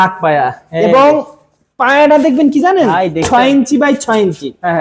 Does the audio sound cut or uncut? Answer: uncut